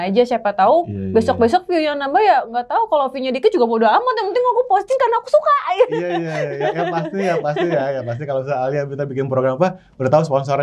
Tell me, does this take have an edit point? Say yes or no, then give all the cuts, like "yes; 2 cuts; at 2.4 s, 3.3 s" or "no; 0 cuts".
no; 0 cuts